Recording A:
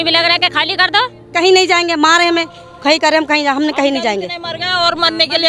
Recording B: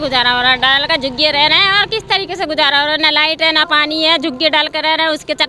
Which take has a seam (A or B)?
A